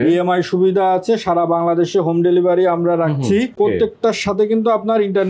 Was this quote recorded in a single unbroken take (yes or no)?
no